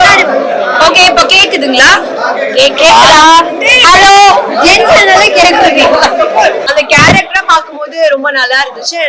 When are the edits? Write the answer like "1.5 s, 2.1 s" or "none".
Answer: 6.6 s